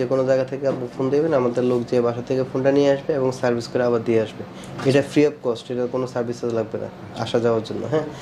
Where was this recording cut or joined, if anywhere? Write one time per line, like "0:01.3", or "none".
none

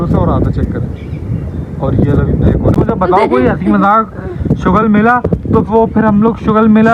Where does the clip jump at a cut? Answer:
0:02.8

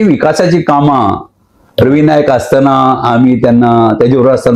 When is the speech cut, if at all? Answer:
none

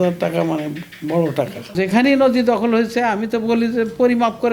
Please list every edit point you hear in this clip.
0:01.8

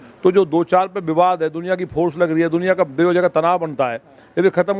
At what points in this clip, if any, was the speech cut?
none

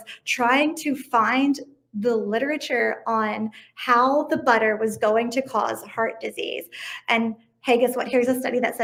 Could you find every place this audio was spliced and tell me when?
none

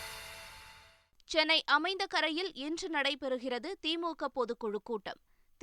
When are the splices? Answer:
0:01.0

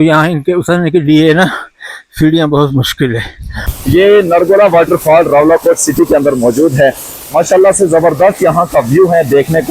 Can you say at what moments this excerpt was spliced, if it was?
0:03.7

